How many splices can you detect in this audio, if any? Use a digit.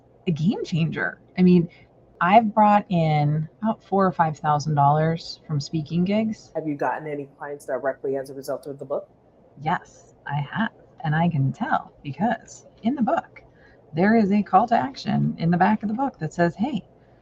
3